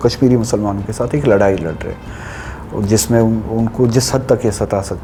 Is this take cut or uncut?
uncut